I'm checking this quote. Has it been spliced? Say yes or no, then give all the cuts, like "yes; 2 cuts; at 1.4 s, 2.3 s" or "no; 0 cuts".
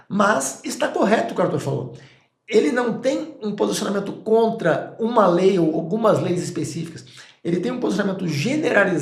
no; 0 cuts